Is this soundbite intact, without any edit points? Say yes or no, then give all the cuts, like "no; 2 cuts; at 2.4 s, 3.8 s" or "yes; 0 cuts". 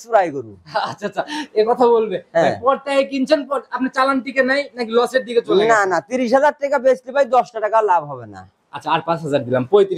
yes; 0 cuts